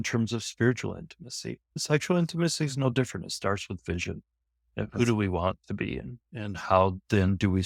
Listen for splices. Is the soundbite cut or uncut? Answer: uncut